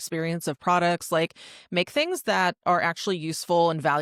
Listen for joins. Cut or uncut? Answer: uncut